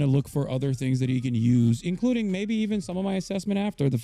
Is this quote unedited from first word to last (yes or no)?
yes